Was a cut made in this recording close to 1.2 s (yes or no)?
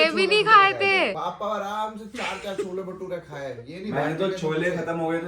yes